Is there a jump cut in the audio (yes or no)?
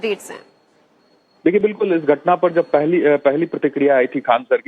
no